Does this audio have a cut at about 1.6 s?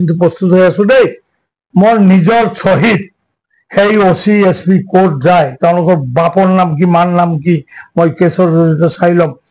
yes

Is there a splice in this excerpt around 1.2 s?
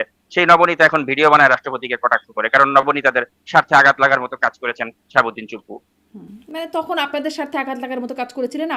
no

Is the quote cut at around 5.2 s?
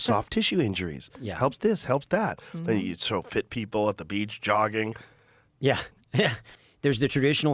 no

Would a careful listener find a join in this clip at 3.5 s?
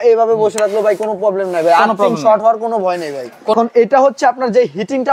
yes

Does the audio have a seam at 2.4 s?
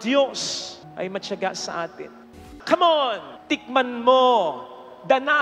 yes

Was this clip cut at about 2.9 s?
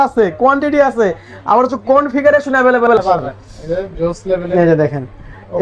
yes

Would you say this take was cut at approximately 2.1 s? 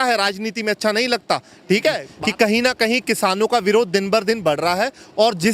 yes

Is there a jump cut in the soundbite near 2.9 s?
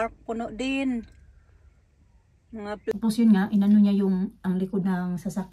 yes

